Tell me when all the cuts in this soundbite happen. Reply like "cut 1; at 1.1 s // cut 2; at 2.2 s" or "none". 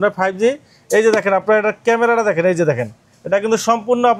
none